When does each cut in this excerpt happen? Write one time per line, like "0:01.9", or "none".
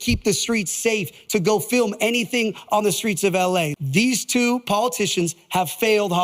0:03.7